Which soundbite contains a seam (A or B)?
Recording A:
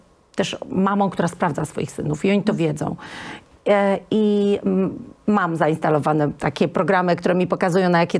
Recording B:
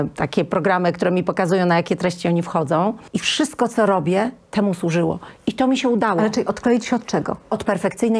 B